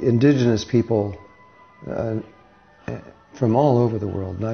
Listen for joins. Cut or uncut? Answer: cut